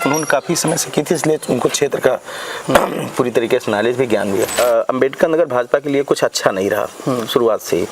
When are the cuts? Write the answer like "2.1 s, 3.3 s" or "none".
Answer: 4.5 s